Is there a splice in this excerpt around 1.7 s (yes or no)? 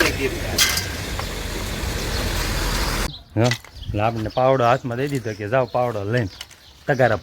no